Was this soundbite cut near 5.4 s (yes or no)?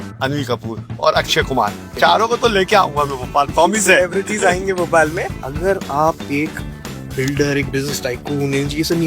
yes